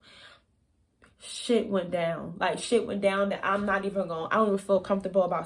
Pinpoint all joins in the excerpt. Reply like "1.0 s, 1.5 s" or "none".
none